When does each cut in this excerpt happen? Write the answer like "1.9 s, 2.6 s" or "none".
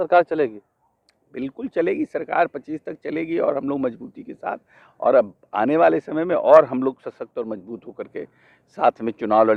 none